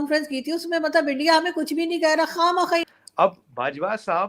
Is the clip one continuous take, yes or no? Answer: no